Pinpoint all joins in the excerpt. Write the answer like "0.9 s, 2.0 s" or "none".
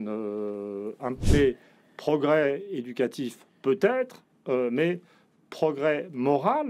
1.1 s